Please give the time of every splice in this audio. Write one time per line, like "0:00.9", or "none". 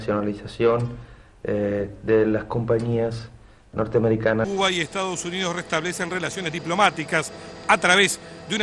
0:04.5